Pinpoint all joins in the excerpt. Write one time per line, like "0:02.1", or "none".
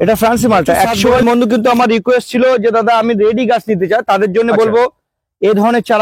0:01.2